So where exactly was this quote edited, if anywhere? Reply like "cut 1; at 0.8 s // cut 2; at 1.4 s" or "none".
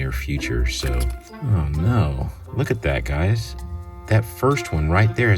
cut 1; at 1.2 s